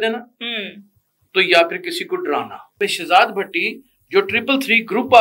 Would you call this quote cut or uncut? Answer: cut